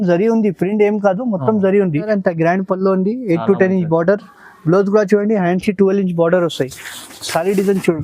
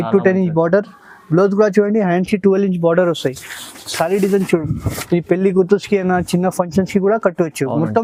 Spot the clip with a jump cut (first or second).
first